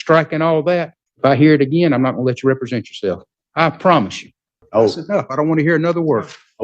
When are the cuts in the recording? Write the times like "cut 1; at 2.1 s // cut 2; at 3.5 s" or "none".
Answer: cut 1; at 1.0 s // cut 2; at 3.3 s // cut 3; at 4.5 s